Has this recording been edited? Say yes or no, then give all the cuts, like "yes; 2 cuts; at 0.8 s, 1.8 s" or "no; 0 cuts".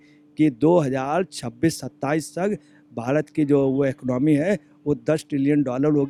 no; 0 cuts